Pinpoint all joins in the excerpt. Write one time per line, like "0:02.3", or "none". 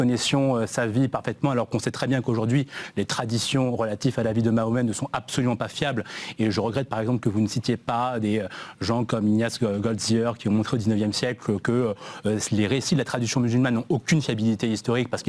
0:07.0